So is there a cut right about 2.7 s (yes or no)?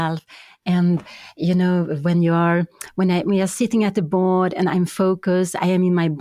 no